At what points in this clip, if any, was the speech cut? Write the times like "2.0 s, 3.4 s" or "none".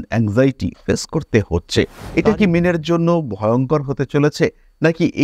2.0 s